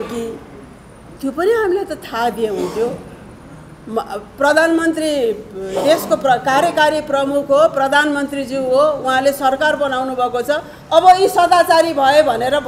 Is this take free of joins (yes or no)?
yes